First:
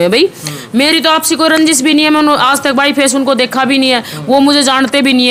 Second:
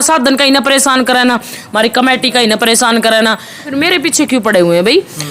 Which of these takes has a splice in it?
second; 1 cut; at 3.7 s

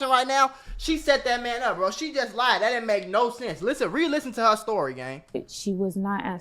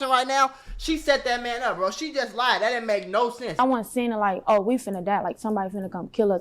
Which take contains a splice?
second; 1 cut; at 3.6 s

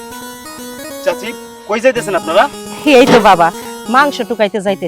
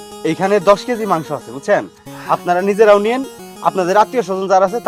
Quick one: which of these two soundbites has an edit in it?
first; 1 cut; at 1.0 s

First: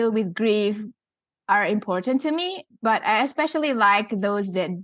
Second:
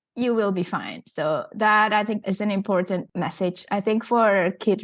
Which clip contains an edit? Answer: second; 2 cuts; at 2.2 s, 3.1 s

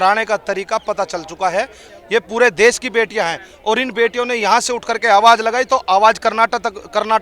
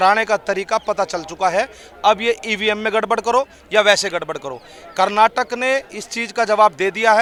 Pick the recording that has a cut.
first; 1 cut; at 1.9 s

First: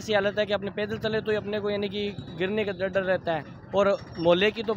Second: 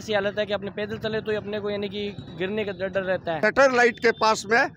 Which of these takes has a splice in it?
second; 1 cut; at 3.4 s

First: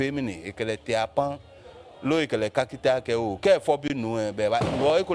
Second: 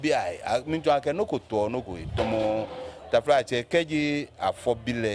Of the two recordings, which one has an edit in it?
second; 1 cut; at 3.9 s

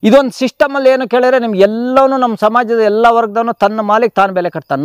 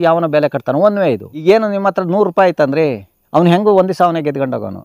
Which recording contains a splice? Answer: second; 1 cut; at 1.4 s

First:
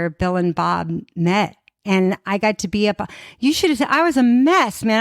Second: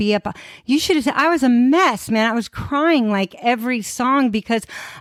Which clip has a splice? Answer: first; 1 cut; at 1.8 s

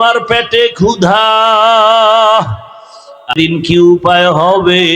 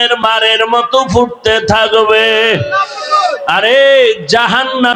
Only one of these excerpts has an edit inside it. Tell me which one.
first; 1 cut; at 3.3 s

